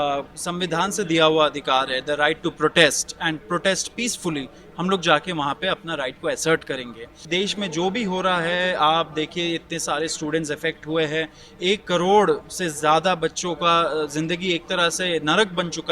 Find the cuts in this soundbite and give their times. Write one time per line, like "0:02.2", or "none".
0:07.3